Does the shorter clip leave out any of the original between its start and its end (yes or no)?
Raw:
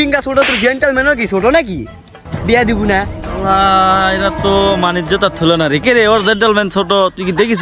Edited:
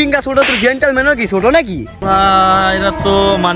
yes